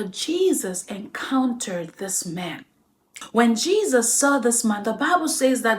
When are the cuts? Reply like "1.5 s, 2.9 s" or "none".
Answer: 3.2 s